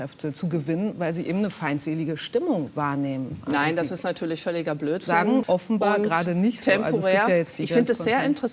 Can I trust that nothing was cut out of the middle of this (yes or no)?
no